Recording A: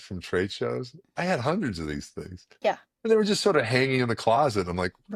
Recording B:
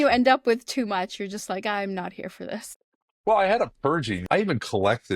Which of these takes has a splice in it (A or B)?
B